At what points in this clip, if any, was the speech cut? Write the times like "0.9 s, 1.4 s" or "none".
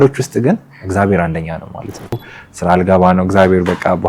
2.3 s